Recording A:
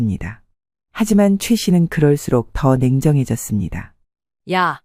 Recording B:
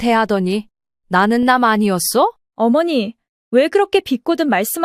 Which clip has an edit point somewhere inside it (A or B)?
B